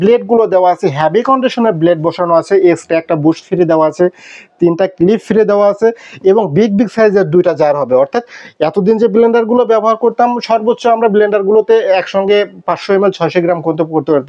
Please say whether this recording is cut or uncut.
uncut